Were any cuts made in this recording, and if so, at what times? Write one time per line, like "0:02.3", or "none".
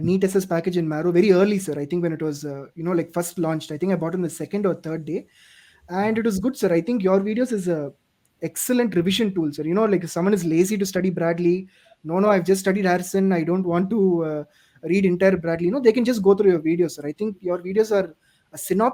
none